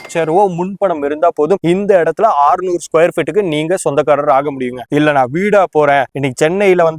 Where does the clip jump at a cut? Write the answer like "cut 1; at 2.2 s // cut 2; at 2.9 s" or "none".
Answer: none